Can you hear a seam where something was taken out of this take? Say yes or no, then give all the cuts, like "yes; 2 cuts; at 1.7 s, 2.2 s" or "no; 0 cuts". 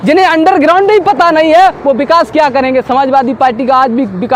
no; 0 cuts